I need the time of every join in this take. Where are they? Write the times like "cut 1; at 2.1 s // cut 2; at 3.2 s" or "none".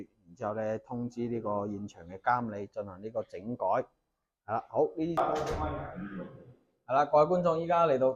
cut 1; at 5.1 s